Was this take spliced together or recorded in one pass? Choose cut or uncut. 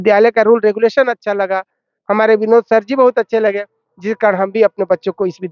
uncut